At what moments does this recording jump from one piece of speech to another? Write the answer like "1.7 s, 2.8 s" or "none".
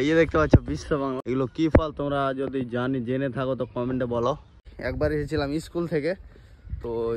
1.2 s, 4.7 s